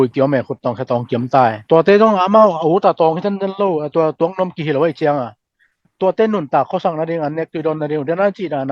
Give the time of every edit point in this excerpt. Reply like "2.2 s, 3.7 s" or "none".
1.6 s